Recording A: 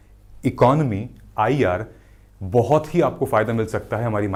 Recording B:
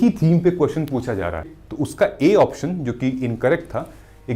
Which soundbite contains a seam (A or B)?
B